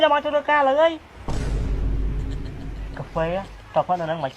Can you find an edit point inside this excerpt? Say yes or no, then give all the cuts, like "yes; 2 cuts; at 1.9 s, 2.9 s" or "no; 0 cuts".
yes; 2 cuts; at 1.1 s, 2.9 s